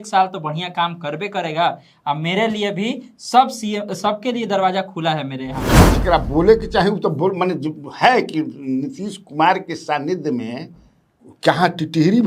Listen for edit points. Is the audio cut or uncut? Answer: cut